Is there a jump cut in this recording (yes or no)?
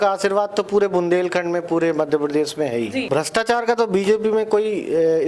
yes